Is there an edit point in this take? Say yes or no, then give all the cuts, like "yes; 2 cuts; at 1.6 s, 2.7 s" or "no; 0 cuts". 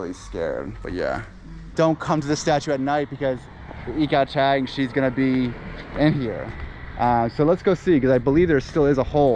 yes; 1 cut; at 1.6 s